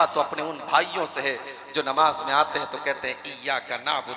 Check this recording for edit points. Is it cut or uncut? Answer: uncut